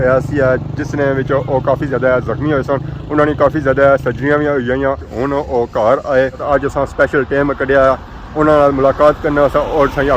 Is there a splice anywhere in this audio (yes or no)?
yes